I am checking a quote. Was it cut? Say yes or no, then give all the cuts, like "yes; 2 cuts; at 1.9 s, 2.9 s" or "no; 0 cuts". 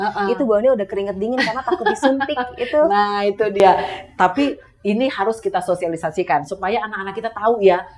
no; 0 cuts